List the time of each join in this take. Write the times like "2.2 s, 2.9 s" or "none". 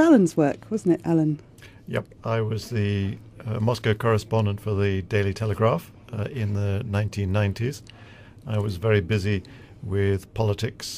none